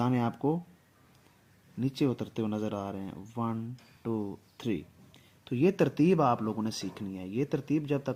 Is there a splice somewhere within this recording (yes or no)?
no